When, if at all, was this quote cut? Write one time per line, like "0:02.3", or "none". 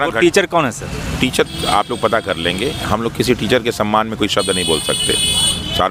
none